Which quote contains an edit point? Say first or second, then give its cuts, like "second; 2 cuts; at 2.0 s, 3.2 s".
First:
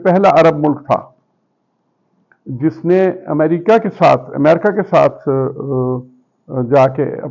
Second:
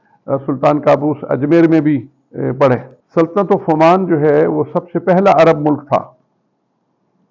second; 1 cut; at 3.0 s